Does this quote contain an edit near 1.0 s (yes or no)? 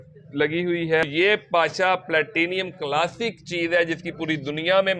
yes